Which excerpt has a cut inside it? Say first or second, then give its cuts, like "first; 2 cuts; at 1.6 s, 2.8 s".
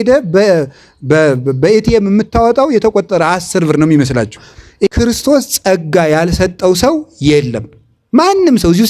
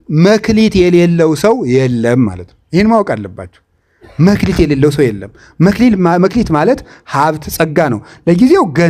first; 1 cut; at 4.9 s